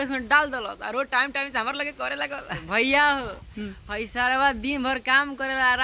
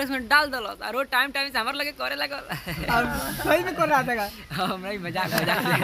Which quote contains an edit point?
first; 1 cut; at 2.6 s

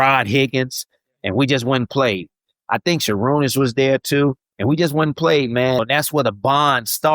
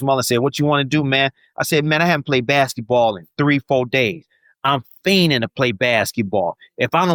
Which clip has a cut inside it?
first; 1 cut; at 5.8 s

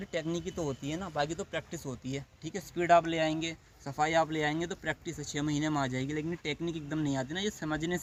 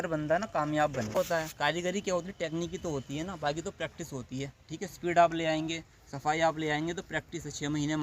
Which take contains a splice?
second; 1 cut; at 1.2 s

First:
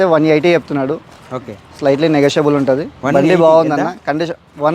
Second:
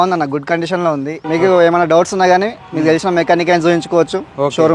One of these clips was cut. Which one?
second; 1 cut; at 1.2 s

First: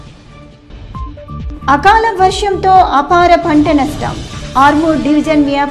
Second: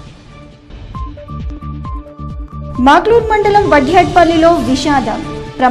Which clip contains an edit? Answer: first; 1 cut; at 1.5 s

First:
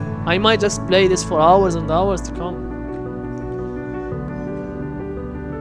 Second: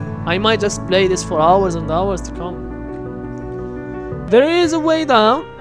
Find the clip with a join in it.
second; 1 cut; at 4.2 s

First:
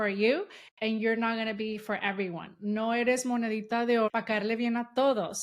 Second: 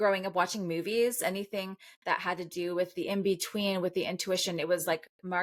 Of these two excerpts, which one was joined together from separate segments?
first; 1 cut; at 4.1 s

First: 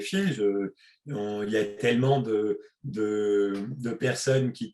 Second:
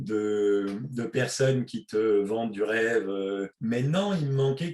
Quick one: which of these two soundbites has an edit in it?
second; 1 cut; at 3.5 s

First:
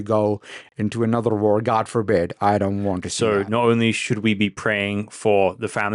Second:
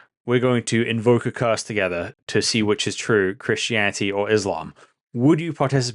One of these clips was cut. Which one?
first; 1 cut; at 3.1 s

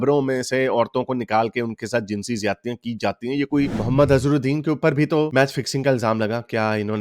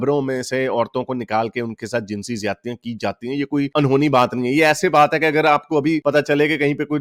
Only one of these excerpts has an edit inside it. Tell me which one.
first; 1 cut; at 3.7 s

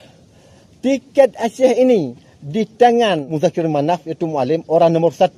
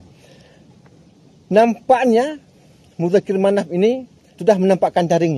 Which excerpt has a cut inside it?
first; 1 cut; at 3.3 s

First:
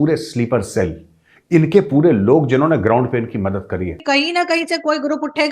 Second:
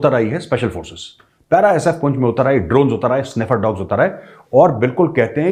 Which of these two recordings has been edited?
first; 1 cut; at 4.0 s

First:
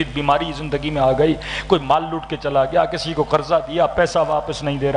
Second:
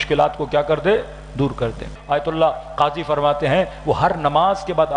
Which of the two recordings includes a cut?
second; 1 cut; at 1.9 s

